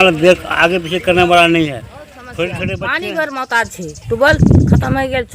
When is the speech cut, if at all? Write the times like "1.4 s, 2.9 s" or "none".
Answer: 2.8 s